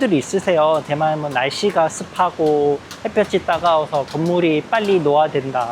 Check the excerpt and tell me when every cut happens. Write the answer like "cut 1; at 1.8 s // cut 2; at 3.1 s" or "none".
none

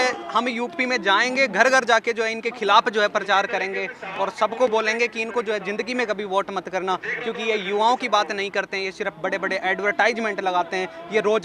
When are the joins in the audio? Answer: none

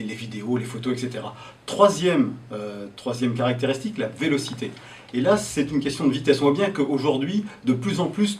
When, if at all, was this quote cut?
cut 1; at 5.9 s

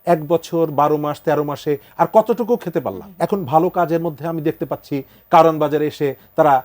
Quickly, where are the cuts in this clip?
cut 1; at 3.1 s

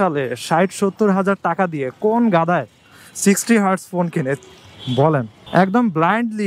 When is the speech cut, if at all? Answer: cut 1; at 5.4 s

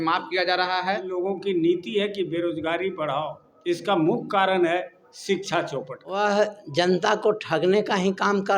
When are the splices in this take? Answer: cut 1; at 1.1 s // cut 2; at 3.5 s // cut 3; at 6.1 s

